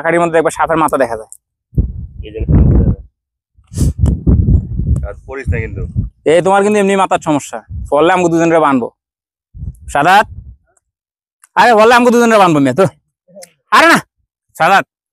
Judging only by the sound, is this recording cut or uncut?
uncut